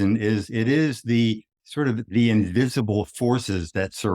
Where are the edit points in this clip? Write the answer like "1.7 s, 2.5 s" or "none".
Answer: 1.6 s